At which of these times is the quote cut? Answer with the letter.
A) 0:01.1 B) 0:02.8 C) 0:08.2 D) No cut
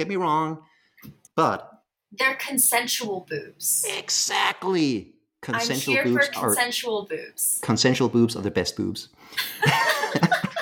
A